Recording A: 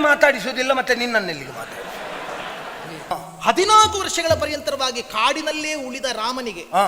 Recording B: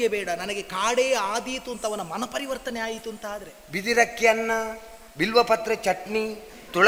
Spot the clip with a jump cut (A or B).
A